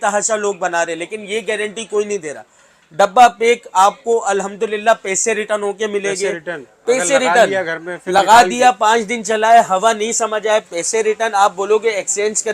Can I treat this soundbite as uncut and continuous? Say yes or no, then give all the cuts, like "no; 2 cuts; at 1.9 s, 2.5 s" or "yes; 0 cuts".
yes; 0 cuts